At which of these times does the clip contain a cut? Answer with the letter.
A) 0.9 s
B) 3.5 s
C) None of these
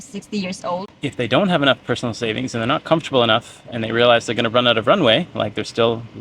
A